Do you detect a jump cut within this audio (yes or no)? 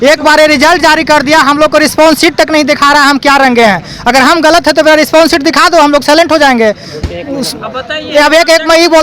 no